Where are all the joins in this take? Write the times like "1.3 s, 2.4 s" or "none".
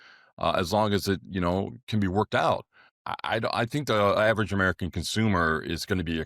3.0 s